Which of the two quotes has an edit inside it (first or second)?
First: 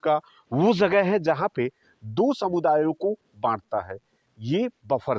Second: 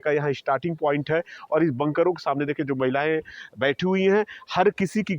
second